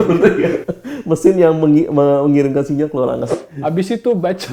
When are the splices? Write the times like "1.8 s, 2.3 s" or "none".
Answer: 3.3 s

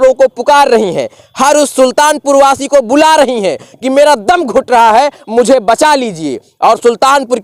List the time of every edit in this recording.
none

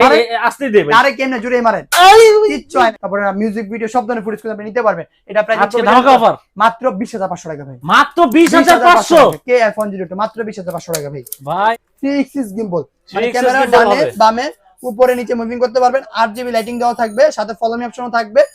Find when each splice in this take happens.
2.9 s, 11.7 s

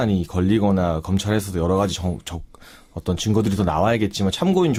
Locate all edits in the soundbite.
none

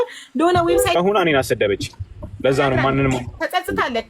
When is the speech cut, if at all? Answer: 1.0 s

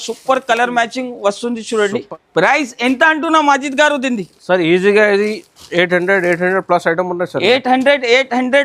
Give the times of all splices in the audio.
2.0 s

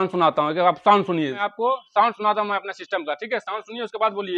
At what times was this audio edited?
1.4 s

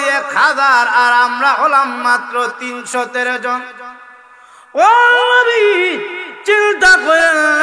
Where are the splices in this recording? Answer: none

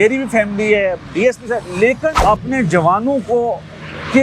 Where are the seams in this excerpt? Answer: 2.2 s

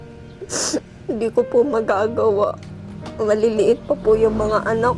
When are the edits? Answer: none

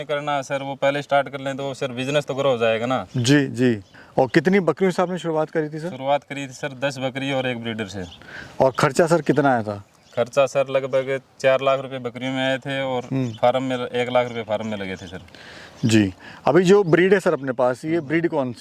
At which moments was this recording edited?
none

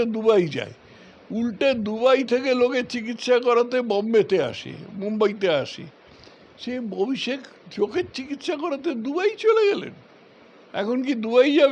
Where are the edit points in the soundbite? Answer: none

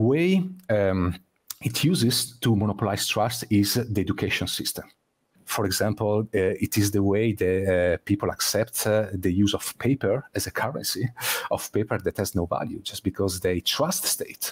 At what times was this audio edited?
5.4 s

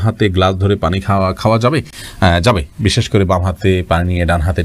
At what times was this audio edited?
none

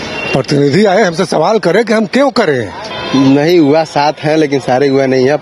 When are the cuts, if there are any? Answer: 2.9 s

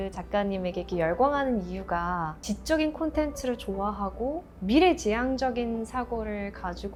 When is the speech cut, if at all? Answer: none

